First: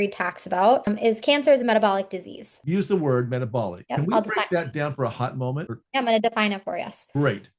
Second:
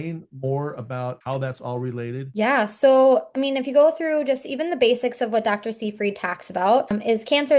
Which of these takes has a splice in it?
first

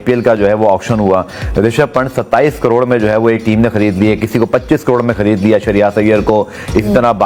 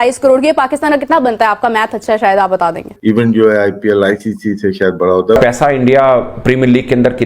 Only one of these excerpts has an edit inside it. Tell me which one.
second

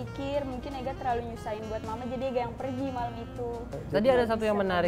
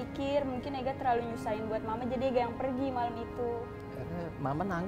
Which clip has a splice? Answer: first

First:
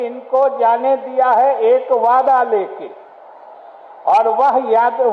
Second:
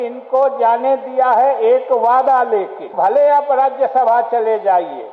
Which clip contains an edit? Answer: second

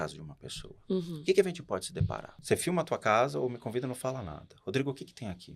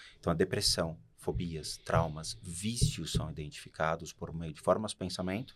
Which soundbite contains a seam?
first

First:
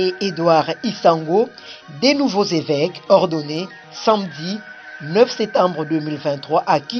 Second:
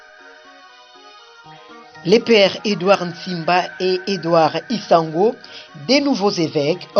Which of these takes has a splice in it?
second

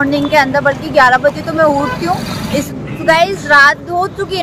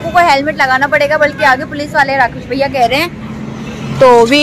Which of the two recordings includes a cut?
first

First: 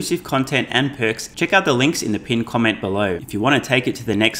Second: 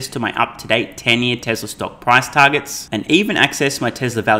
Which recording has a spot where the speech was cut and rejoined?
first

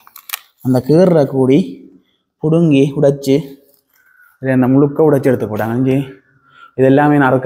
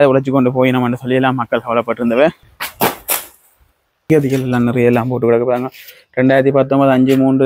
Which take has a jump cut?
second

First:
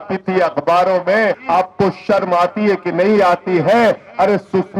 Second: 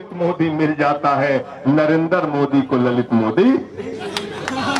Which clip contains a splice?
first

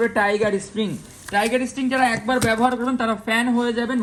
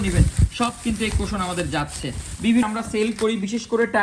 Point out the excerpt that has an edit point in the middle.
second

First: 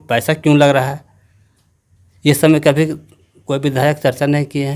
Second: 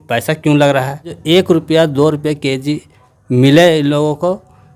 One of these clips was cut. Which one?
second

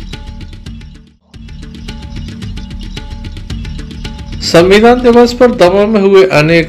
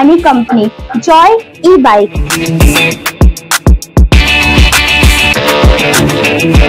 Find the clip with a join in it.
first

